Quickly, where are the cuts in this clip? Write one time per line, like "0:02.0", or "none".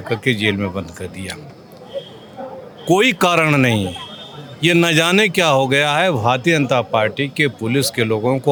none